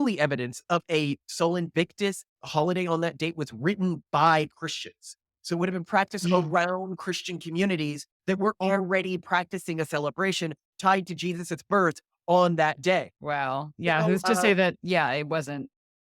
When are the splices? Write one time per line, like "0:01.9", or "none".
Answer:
0:13.2